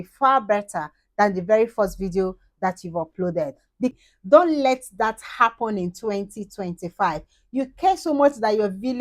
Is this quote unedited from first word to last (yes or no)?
no